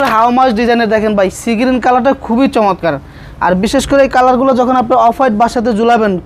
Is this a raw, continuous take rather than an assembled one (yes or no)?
yes